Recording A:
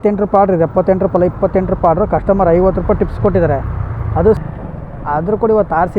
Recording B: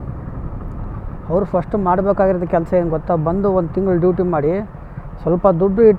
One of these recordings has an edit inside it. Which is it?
A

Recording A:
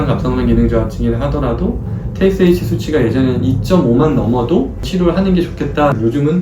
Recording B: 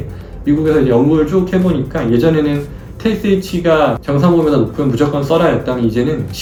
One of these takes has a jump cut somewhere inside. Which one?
A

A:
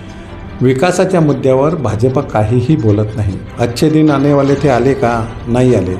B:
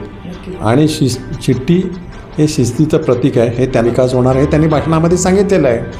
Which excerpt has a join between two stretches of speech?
B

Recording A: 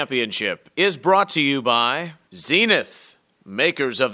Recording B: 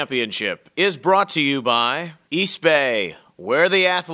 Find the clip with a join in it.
A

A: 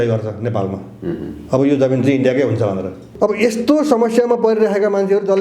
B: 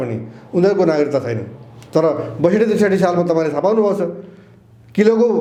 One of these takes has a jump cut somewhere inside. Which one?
A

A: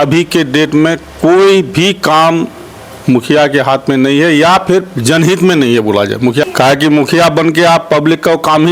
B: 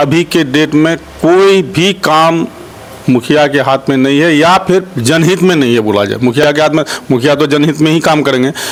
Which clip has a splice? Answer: A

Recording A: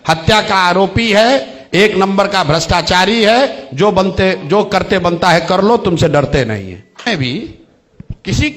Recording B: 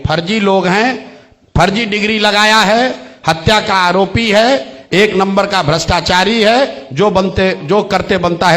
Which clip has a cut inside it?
A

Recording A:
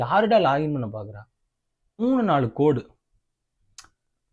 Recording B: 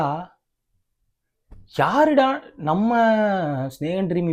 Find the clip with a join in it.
A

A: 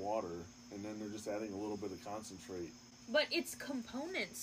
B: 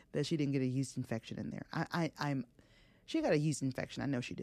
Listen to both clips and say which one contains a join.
A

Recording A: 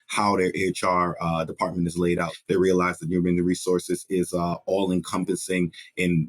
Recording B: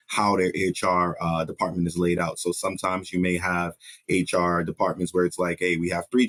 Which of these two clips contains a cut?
A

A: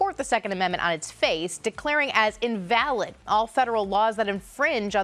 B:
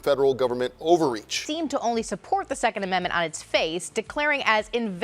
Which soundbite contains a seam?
B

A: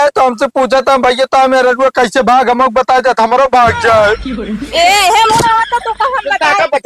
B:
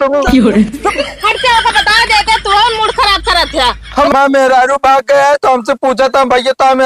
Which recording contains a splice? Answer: B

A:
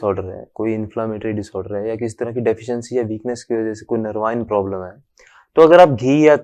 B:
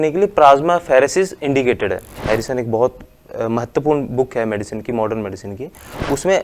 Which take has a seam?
B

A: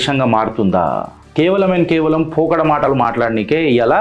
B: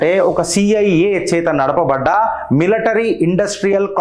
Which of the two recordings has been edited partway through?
A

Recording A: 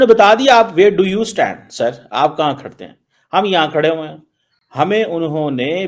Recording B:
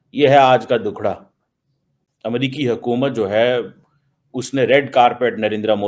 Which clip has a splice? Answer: B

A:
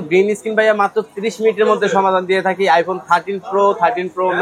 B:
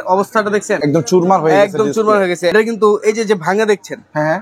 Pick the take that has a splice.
B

